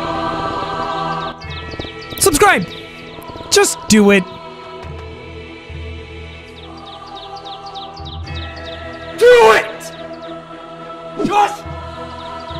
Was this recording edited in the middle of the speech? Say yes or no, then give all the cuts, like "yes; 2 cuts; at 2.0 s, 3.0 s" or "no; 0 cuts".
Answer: no; 0 cuts